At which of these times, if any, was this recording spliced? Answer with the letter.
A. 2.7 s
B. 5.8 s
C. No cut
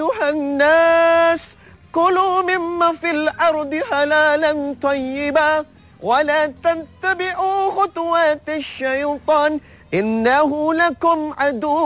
A